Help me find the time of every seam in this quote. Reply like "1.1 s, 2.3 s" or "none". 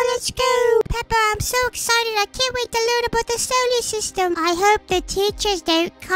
4.3 s